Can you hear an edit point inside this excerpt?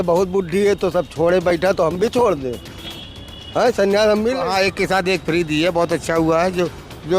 yes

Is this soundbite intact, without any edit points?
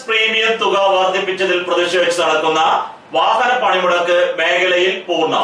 yes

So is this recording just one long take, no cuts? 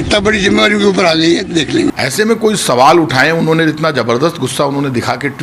no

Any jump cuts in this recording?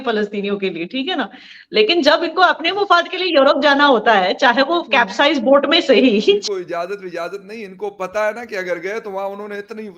yes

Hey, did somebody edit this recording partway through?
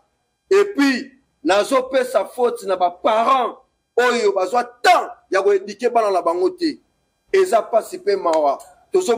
no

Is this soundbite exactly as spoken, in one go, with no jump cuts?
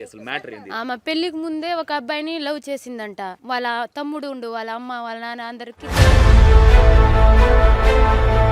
no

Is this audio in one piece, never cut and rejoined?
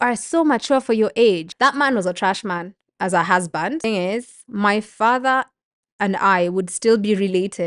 no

